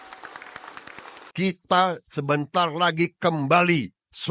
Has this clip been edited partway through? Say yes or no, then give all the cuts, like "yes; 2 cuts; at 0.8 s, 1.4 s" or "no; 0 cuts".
yes; 1 cut; at 1.2 s